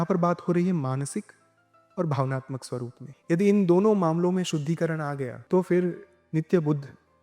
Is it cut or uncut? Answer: cut